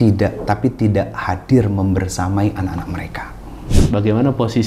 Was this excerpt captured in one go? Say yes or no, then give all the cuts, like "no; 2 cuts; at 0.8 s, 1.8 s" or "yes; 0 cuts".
no; 1 cut; at 3.8 s